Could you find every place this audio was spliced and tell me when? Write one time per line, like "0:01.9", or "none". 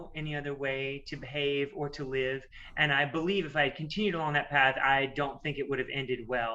0:04.8